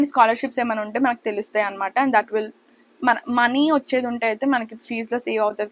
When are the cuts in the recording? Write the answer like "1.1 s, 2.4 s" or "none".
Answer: none